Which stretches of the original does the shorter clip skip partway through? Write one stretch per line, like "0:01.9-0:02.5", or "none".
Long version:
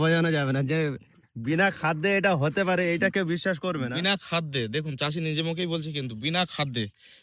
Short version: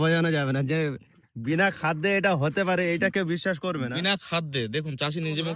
none